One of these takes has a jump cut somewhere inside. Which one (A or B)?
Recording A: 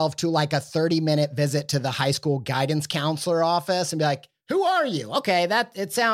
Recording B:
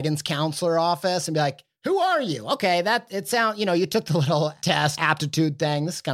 B